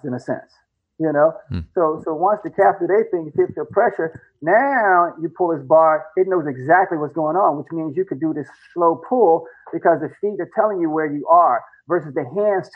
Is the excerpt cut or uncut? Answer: uncut